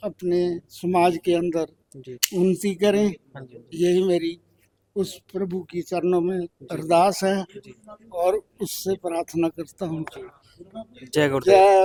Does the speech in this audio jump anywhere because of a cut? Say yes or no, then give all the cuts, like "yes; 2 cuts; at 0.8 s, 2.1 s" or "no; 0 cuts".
no; 0 cuts